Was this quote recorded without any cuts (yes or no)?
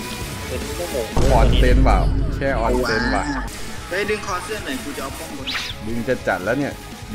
no